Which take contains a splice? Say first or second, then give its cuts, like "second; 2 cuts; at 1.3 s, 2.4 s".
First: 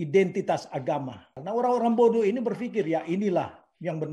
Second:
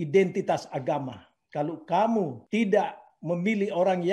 first; 1 cut; at 1.3 s